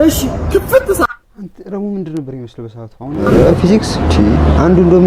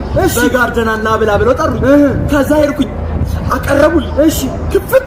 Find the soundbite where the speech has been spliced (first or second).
first